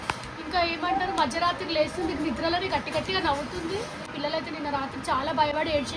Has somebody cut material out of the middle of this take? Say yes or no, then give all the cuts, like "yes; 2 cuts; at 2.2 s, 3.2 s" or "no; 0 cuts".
yes; 1 cut; at 4.1 s